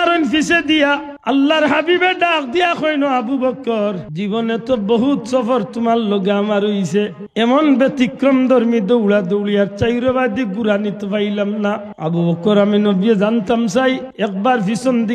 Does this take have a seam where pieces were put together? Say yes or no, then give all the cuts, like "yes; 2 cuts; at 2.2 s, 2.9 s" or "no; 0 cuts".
yes; 5 cuts; at 1.1 s, 4.1 s, 7.2 s, 11.9 s, 14.1 s